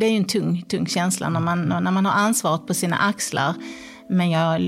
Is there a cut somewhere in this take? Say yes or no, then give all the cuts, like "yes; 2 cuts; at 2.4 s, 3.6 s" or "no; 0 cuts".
no; 0 cuts